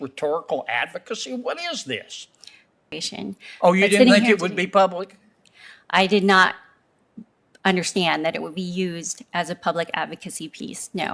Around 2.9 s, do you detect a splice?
yes; 1 cut; at 2.9 s

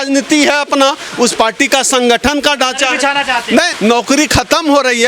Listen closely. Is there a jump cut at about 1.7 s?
no; 1 cut; at 3.7 s

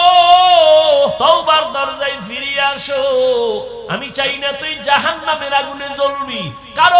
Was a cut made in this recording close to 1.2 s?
yes; 1 cut; at 1.2 s

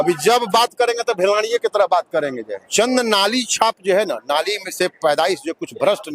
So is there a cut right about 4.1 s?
no; 1 cut; at 2.5 s

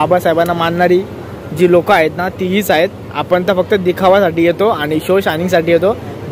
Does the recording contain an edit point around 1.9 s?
no; 0 cuts

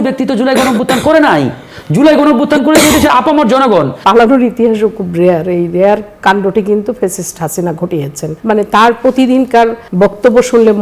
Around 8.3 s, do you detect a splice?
yes; 3 cuts; at 4.0 s, 8.3 s, 9.8 s

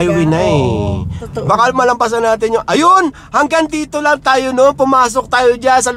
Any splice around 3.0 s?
no; 1 cut; at 1.2 s

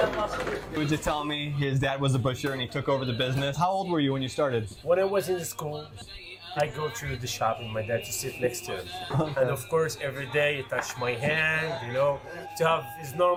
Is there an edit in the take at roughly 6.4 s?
no; 0 cuts

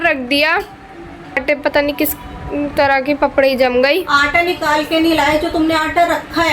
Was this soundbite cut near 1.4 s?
yes; 1 cut; at 1.4 s

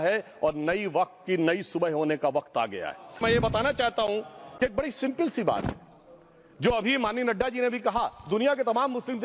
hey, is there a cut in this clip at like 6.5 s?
no; 1 cut; at 3.2 s

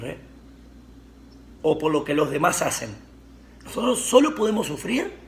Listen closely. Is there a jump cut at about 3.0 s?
no; 0 cuts

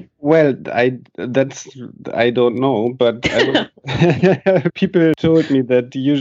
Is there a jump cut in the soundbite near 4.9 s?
yes; 1 cut; at 4.9 s

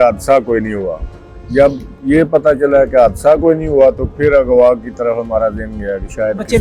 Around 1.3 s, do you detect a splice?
no; 0 cuts

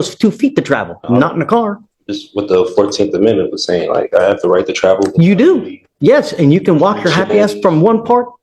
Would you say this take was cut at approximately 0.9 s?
no; 0 cuts

